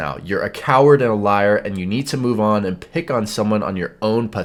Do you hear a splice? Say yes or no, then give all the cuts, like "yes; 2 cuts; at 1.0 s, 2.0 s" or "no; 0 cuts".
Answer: no; 0 cuts